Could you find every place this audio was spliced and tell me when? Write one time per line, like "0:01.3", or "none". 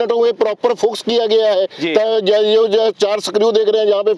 none